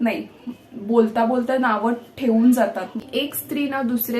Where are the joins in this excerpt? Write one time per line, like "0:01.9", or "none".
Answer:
0:03.0